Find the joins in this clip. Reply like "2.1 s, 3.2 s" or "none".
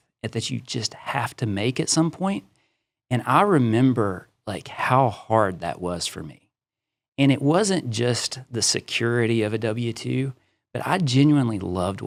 none